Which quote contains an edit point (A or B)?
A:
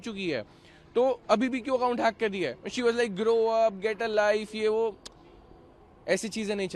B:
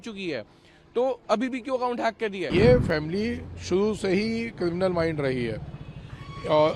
B